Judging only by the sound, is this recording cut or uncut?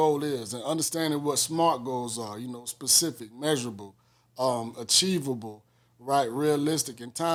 uncut